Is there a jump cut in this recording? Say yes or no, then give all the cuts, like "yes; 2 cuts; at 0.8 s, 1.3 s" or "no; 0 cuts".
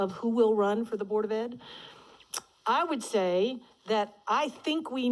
yes; 1 cut; at 3.7 s